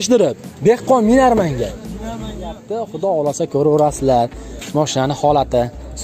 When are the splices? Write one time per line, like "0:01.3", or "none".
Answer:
0:02.7